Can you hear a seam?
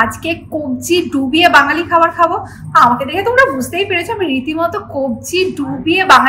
no; 0 cuts

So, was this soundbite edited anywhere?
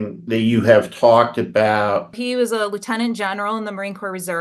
yes; 1 cut; at 2.1 s

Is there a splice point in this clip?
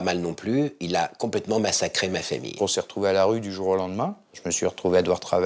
yes; 2 cuts; at 2.6 s, 4.5 s

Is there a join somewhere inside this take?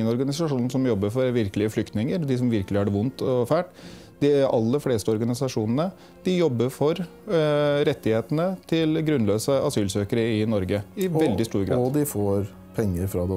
no; 0 cuts

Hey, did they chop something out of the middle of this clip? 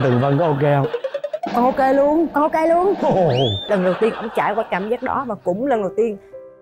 yes; 1 cut; at 3.6 s

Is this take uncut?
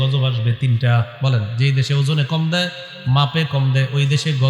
yes; 0 cuts

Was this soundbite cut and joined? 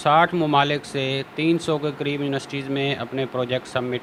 no; 0 cuts

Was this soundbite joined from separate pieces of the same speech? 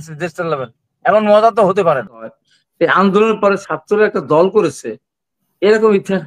yes; 1 cut; at 2.2 s

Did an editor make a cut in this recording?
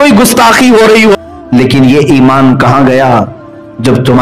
yes; 1 cut; at 1.2 s

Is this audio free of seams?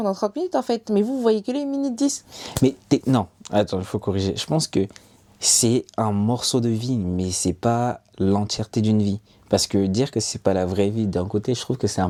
yes; 0 cuts

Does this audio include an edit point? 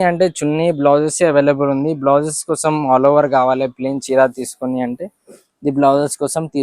no; 0 cuts

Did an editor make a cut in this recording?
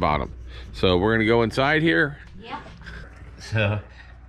yes; 1 cut; at 3.1 s

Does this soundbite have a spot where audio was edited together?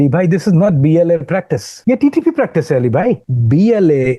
yes; 2 cuts; at 1.6 s, 3.3 s

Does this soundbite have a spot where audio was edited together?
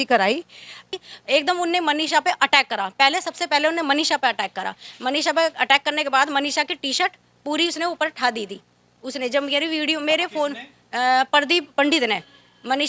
yes; 1 cut; at 0.9 s

